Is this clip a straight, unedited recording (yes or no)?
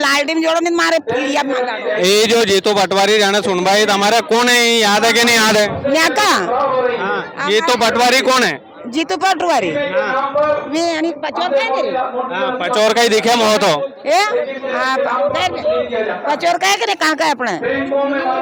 yes